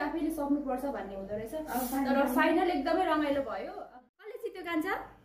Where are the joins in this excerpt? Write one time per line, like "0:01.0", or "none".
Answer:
0:03.6